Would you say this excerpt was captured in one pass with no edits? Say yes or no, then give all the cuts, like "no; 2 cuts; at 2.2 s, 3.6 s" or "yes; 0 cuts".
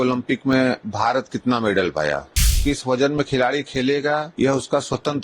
no; 2 cuts; at 2.5 s, 4.3 s